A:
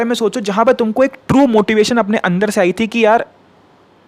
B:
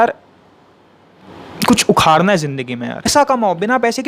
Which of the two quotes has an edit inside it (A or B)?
B